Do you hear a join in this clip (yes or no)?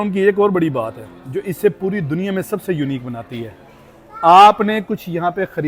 no